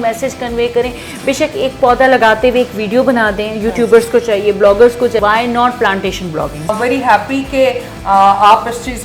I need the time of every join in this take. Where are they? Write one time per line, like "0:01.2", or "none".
0:05.2
0:06.7